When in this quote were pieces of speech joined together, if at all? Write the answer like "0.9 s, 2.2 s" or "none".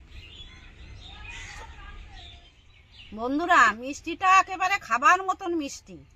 2.7 s